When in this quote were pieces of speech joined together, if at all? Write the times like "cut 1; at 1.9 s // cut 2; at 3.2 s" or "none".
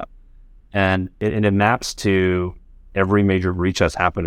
cut 1; at 1.2 s